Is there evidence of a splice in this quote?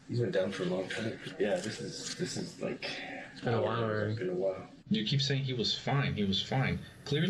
yes; 2 cuts; at 1.2 s, 4.7 s

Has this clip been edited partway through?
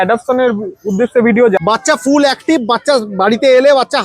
yes; 1 cut; at 1.6 s

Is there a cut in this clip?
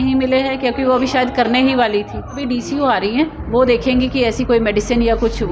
yes; 1 cut; at 2.4 s

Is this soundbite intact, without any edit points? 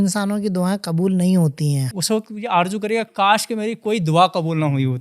no; 1 cut; at 1.9 s

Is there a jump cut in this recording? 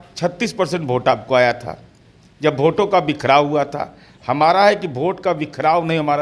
no; 0 cuts

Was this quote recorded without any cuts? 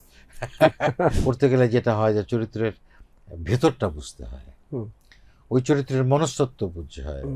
no; 1 cut; at 1.2 s

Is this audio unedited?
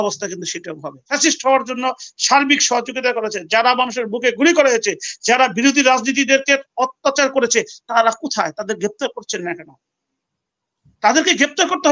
no; 1 cut; at 1.1 s

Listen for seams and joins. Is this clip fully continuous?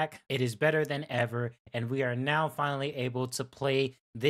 yes; 0 cuts

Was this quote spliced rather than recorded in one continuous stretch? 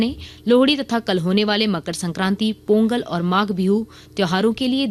no; 0 cuts

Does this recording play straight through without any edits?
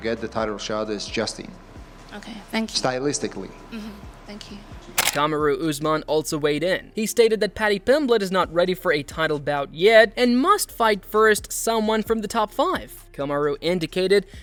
yes; 0 cuts

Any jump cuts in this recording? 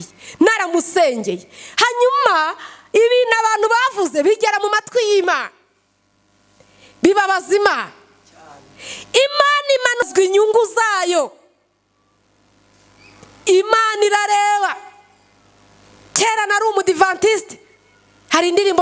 yes; 1 cut; at 10.1 s

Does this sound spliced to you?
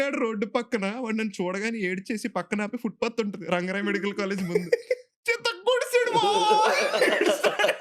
no; 0 cuts

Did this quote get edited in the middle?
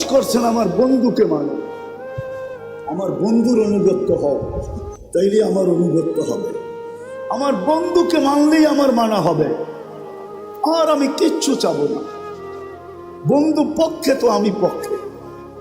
yes; 2 cuts; at 1.6 s, 2.8 s

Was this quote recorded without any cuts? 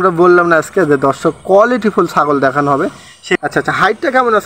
no; 1 cut; at 3.3 s

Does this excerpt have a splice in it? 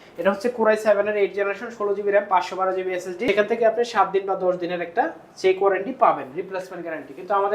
yes; 1 cut; at 3.3 s

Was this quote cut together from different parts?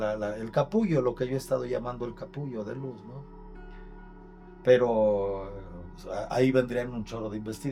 no; 0 cuts

